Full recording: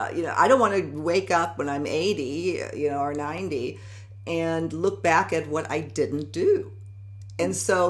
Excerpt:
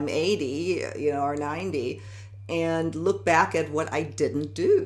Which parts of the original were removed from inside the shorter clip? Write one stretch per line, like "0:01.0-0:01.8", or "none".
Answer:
none